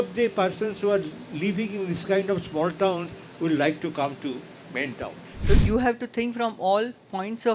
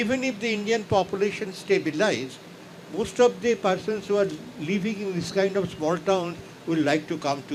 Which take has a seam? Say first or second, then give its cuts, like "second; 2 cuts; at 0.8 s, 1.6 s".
first; 1 cut; at 5.3 s